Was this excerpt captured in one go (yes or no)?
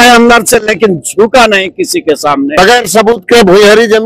no